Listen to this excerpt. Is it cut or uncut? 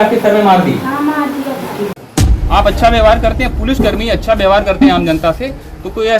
cut